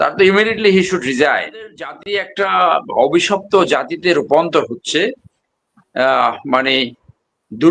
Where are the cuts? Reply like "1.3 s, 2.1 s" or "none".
1.9 s